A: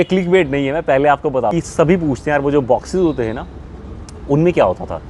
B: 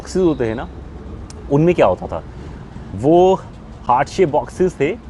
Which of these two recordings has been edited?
A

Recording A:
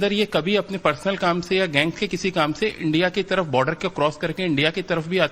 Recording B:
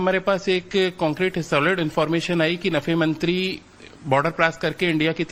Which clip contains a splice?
A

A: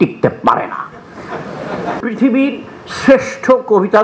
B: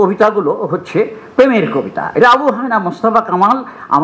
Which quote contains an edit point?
A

